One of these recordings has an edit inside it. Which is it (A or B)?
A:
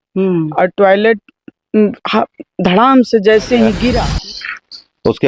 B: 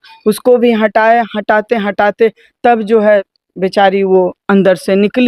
A